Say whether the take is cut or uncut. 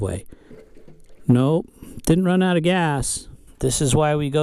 cut